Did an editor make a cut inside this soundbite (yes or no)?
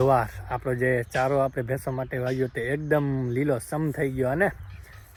no